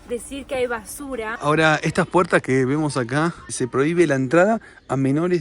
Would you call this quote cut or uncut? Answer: cut